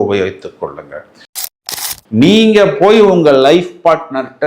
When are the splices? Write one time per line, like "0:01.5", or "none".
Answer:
0:01.5